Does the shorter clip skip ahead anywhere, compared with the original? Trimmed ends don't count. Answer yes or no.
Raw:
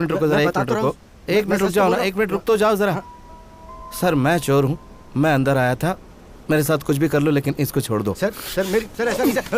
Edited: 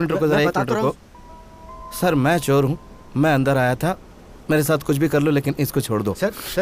yes